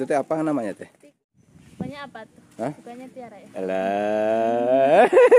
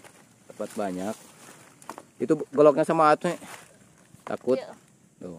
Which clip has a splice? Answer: first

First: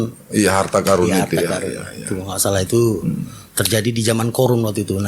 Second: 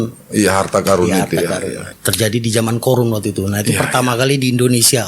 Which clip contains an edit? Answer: second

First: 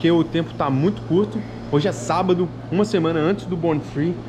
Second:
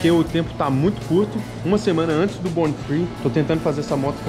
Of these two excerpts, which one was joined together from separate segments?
second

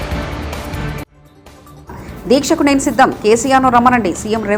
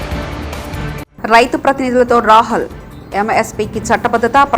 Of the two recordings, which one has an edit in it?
second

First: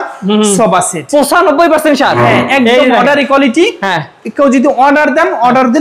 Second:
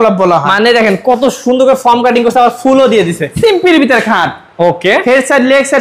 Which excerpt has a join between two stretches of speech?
second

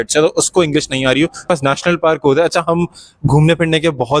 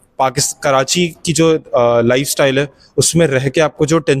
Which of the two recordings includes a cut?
first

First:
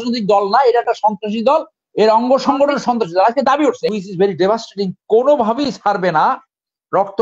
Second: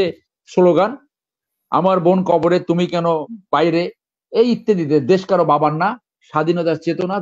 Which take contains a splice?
first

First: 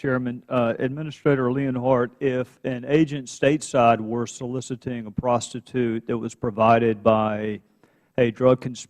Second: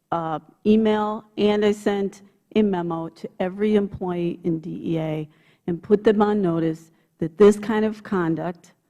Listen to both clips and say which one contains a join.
first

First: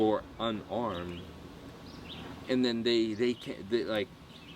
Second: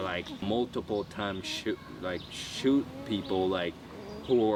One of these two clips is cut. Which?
first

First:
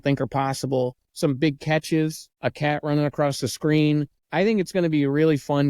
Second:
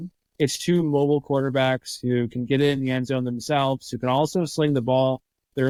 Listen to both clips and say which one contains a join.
first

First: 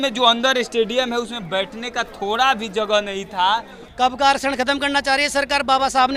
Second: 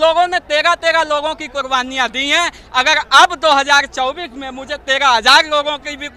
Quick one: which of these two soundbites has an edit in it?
first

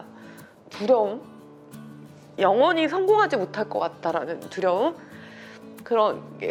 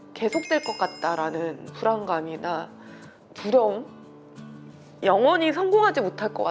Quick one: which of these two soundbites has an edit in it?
second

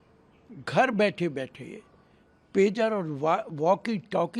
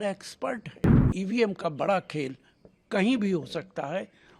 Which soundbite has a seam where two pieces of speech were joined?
second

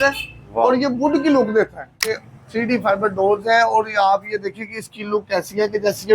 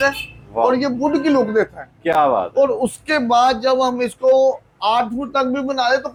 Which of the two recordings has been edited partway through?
first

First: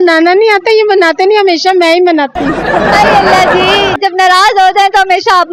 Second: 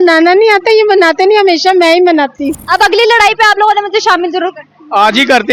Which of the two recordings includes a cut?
second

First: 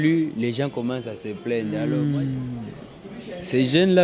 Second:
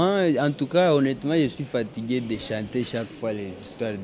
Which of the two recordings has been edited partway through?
first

